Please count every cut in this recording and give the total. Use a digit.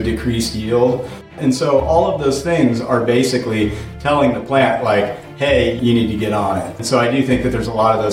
3